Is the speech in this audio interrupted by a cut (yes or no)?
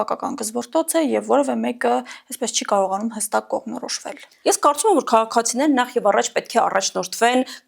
yes